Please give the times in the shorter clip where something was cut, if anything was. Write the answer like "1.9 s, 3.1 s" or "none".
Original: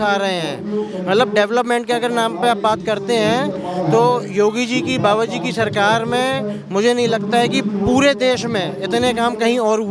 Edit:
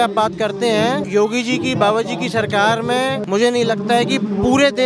1.0 s, 3.2 s